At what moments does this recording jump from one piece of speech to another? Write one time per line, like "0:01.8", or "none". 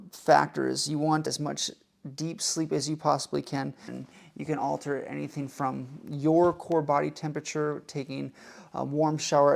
0:01.3

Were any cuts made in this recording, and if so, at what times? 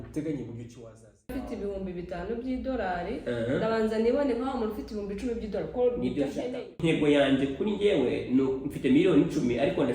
0:01.3
0:06.8

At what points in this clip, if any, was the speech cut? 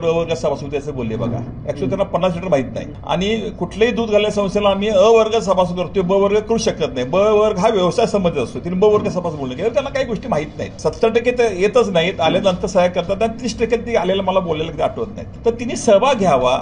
0:02.9
0:10.6
0:15.2

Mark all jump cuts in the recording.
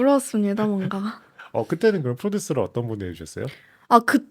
none

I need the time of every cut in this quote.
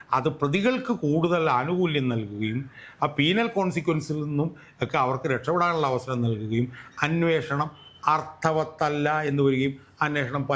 none

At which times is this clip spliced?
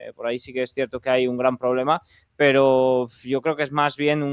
none

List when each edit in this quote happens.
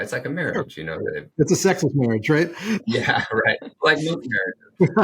0:01.2
0:03.7

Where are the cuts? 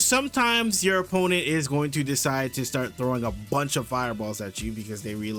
none

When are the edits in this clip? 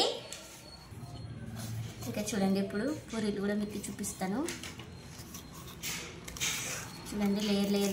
none

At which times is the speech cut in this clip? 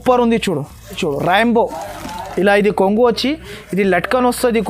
0:01.0

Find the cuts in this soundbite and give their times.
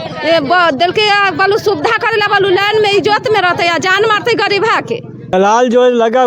0:05.3

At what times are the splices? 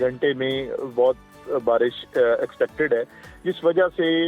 none

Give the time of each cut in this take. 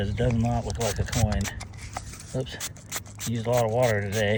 none

